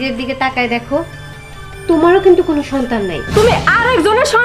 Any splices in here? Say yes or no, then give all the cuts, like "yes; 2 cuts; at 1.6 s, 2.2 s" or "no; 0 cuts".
yes; 1 cut; at 3.3 s